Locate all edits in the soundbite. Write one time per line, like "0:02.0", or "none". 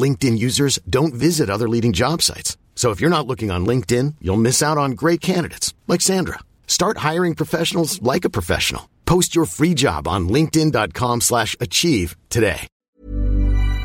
0:12.8